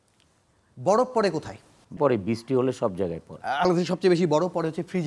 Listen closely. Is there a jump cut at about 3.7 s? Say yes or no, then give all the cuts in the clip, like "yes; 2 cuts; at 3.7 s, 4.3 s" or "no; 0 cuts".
yes; 2 cuts; at 2.0 s, 3.7 s